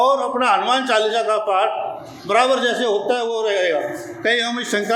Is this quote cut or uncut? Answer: uncut